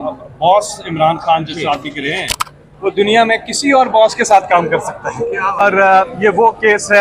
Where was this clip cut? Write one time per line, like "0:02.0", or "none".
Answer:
0:05.6